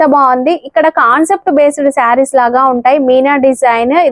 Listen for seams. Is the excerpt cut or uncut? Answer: uncut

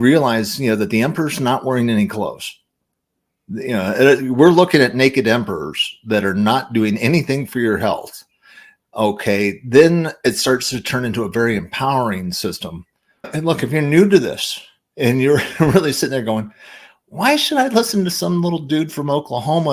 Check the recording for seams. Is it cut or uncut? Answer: cut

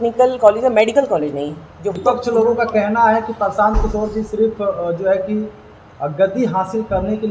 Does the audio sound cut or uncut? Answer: cut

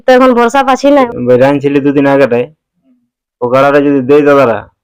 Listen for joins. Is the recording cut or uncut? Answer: cut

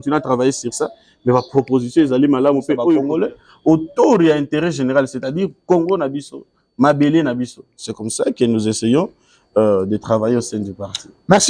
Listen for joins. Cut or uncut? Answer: cut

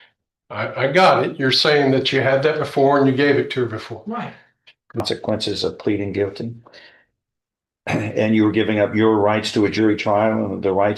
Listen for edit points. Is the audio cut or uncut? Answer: cut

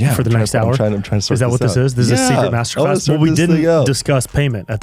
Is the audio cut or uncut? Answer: uncut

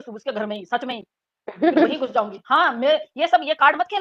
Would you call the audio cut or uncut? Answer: uncut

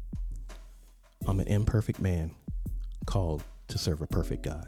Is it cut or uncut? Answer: cut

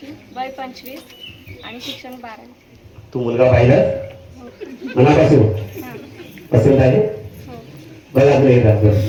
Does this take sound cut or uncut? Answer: uncut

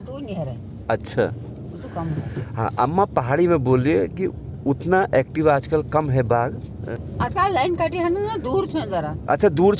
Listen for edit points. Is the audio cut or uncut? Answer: cut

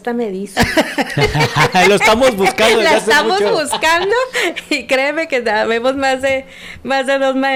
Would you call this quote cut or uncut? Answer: uncut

